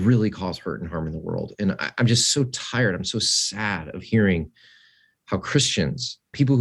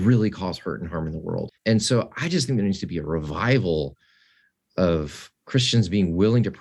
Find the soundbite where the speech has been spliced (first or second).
second